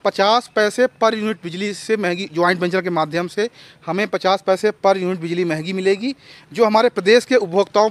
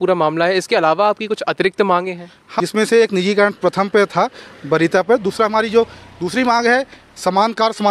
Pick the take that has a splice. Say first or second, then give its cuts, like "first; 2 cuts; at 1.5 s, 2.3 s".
second; 1 cut; at 2.4 s